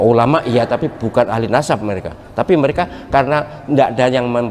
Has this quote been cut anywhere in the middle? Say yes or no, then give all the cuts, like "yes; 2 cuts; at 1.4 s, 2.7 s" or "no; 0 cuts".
no; 0 cuts